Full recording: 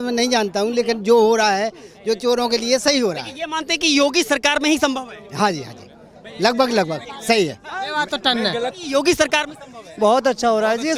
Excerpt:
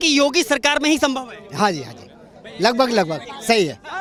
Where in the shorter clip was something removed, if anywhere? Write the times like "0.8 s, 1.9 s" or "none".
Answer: none